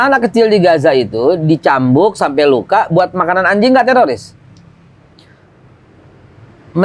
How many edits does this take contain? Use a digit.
0